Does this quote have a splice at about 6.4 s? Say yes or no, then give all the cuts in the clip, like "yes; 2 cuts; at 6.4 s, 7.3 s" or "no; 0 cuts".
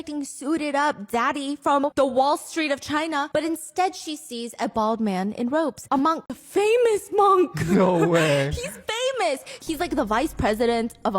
yes; 2 cuts; at 1.8 s, 6.4 s